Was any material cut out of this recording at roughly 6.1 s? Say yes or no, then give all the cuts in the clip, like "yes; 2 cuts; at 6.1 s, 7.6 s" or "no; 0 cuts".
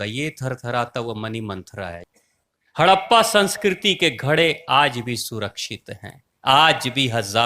no; 1 cut; at 2.0 s